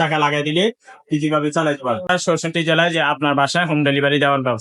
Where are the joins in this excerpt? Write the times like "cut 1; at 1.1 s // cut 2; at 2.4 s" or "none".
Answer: cut 1; at 2.1 s